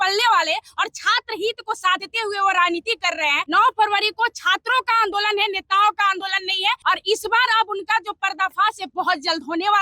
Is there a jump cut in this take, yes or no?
yes